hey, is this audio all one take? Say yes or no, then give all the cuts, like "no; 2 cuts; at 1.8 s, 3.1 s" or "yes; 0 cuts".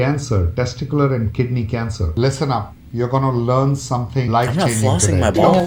yes; 0 cuts